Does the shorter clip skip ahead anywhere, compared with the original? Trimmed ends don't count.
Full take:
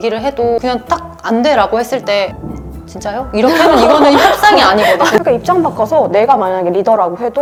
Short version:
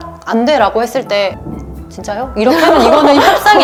no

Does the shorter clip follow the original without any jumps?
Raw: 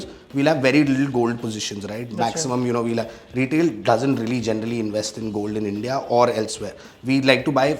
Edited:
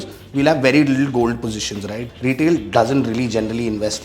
no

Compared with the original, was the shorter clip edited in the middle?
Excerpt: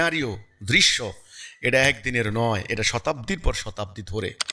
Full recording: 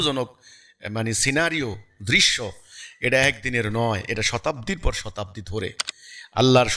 no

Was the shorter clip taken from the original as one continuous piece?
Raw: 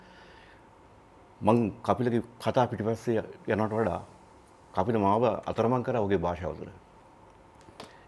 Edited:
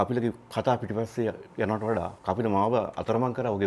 no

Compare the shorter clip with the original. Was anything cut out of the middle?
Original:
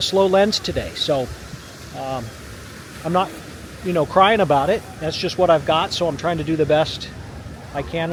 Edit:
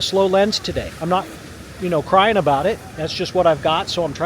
yes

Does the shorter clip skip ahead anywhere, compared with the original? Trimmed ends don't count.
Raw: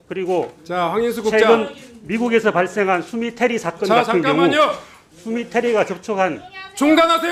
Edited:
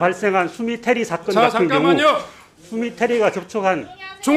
no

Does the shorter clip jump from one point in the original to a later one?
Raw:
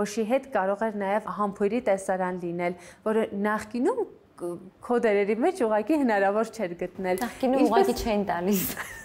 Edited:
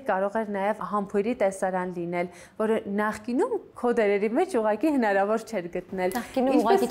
yes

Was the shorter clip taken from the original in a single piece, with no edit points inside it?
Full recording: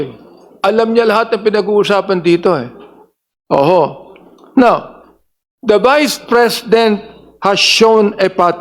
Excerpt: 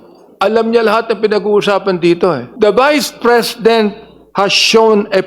no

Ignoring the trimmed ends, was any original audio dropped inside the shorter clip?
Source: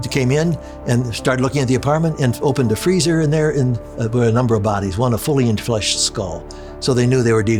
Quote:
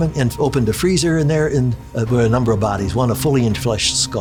no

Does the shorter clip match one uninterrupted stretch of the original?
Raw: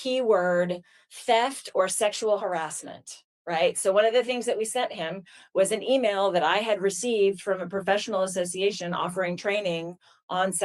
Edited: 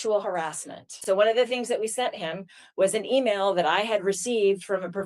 no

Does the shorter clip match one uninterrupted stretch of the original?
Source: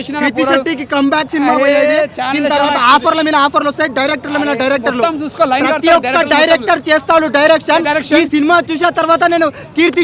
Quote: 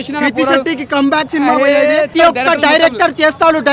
no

